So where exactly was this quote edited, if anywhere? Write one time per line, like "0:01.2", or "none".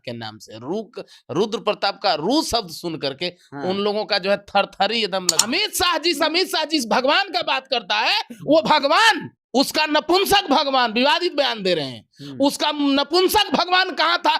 0:05.4
0:09.3